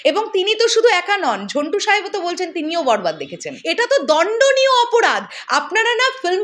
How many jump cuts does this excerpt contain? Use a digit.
1